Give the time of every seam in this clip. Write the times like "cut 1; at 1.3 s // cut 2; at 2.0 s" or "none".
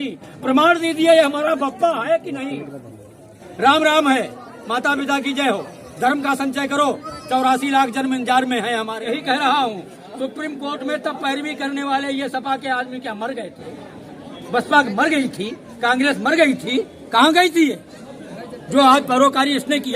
cut 1; at 9.0 s